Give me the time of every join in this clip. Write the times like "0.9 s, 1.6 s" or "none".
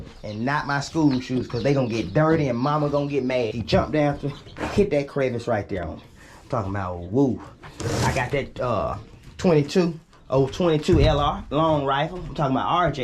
3.6 s